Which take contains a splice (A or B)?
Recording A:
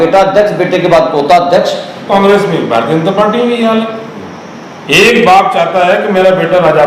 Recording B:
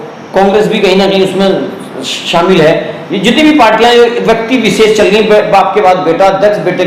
A